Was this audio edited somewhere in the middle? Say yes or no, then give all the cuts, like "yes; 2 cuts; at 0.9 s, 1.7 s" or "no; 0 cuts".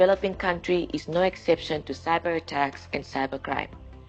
no; 0 cuts